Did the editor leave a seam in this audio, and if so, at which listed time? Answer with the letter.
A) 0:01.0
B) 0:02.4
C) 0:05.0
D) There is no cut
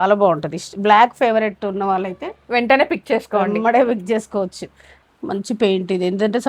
C